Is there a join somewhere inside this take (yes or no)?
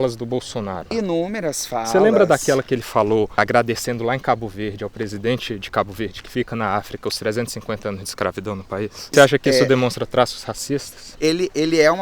yes